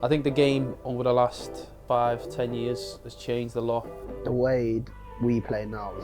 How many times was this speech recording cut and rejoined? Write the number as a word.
two